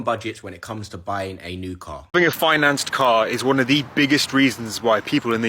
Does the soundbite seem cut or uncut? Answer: cut